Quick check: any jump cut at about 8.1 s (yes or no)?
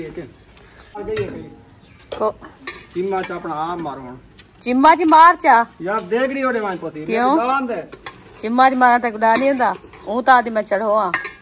no